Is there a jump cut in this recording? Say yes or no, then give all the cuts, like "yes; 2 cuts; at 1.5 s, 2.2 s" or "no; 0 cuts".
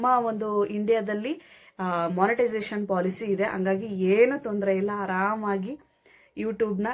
no; 0 cuts